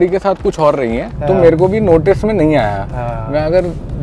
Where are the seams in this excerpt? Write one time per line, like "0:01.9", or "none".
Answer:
0:01.1